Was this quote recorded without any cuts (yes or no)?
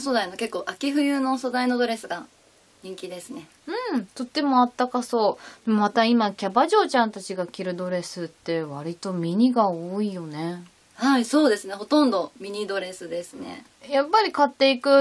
yes